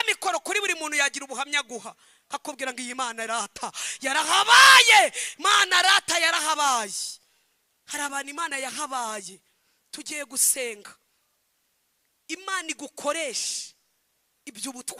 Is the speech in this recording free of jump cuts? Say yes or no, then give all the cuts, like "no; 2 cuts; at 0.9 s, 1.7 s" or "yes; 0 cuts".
yes; 0 cuts